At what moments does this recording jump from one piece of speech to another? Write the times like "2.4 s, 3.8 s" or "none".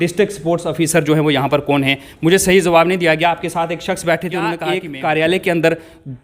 4.7 s